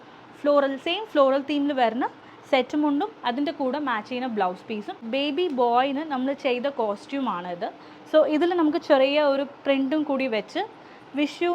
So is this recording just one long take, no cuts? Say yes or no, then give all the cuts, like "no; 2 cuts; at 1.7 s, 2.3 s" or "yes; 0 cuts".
no; 1 cut; at 5.0 s